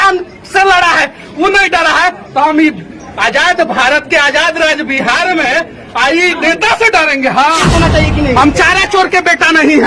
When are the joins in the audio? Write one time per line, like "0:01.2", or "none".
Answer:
0:07.6